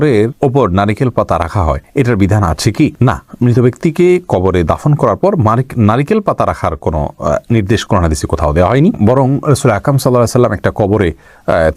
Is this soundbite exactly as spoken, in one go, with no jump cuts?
yes; 0 cuts

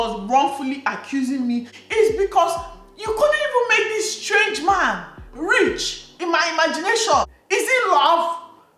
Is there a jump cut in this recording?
no; 0 cuts

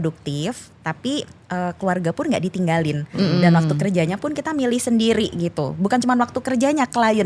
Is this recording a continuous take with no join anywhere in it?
yes; 0 cuts

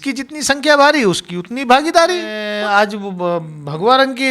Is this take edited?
yes; 1 cut; at 2.4 s

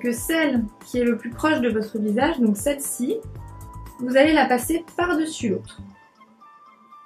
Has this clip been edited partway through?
no; 0 cuts

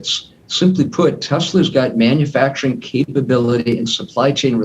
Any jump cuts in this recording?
no; 0 cuts

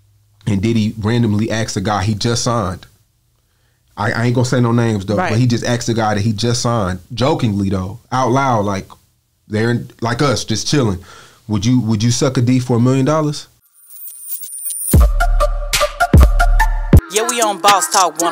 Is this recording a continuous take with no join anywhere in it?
no; 1 cut; at 13.6 s

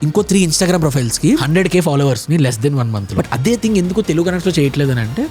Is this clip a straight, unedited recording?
no; 2 cuts; at 1.4 s, 3.1 s

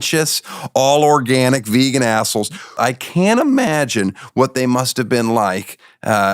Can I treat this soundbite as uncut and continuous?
no; 1 cut; at 2.8 s

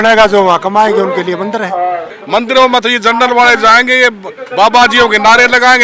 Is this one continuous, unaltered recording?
no; 1 cut; at 2.1 s

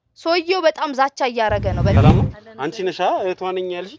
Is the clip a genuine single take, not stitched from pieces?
no; 1 cut; at 1.9 s

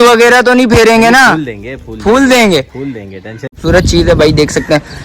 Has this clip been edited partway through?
yes; 1 cut; at 3.5 s

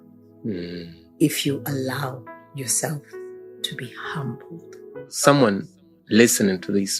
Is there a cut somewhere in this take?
yes; 1 cut; at 5.2 s

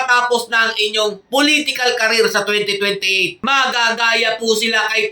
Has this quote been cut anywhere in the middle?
yes; 1 cut; at 3.4 s

